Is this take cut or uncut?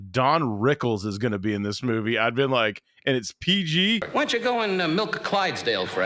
cut